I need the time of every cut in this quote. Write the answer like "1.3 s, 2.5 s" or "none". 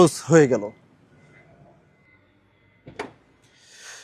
none